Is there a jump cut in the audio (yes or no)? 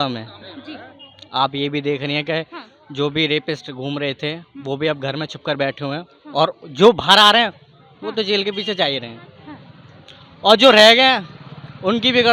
no